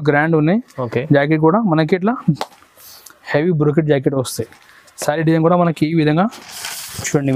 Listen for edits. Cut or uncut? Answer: uncut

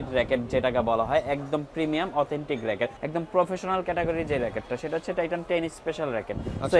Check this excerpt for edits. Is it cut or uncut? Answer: cut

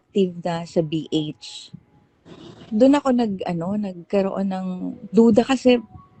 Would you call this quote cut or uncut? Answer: uncut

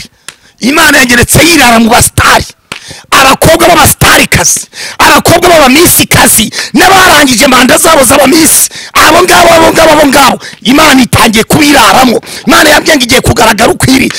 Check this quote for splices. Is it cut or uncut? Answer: uncut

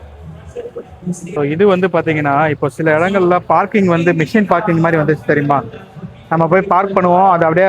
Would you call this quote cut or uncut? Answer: cut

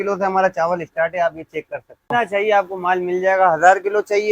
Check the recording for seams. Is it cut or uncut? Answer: cut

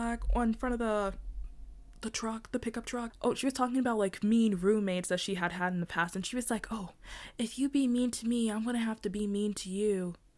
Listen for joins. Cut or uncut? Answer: cut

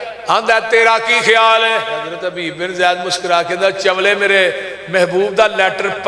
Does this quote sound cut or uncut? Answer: cut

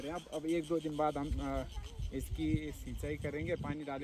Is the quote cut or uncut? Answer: uncut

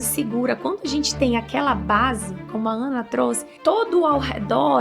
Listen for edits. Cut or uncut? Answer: cut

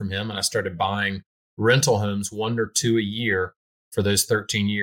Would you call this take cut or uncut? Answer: uncut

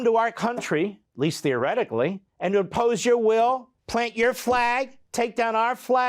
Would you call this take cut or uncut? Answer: cut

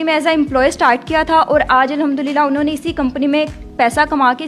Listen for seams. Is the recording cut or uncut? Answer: uncut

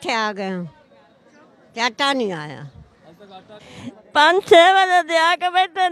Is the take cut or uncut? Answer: cut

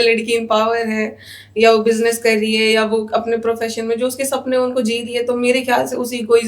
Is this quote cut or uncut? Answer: uncut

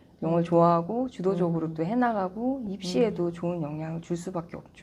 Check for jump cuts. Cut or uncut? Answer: uncut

